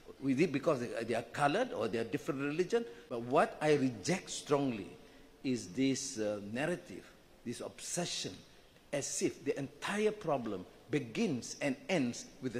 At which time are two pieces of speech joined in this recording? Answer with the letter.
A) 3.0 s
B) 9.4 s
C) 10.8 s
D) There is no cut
A